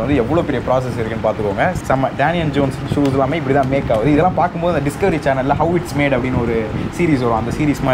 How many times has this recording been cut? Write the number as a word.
one